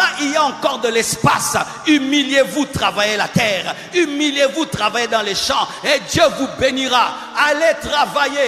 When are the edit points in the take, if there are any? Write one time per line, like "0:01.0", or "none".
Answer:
none